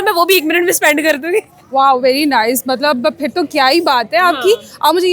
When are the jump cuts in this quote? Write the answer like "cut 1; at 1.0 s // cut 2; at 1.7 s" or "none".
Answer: none

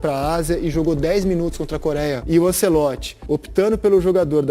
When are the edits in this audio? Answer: cut 1; at 2.2 s // cut 2; at 3.1 s

